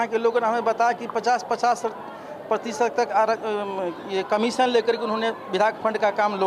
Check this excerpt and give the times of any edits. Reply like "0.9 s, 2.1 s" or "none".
none